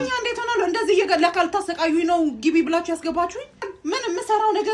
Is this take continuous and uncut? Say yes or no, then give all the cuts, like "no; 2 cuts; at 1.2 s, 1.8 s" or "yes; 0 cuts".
no; 1 cut; at 3.6 s